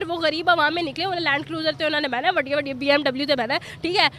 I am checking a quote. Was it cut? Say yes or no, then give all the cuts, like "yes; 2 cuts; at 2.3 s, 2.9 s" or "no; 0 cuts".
no; 0 cuts